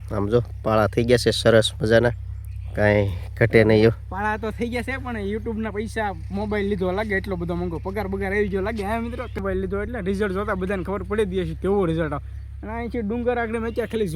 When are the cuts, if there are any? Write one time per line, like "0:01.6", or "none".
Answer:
0:09.4